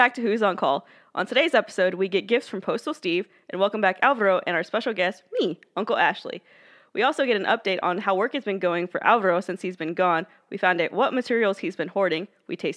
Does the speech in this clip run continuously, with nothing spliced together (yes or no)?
yes